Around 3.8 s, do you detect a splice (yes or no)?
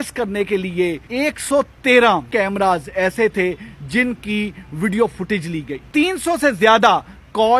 no